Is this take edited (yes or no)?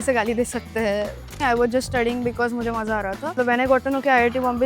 yes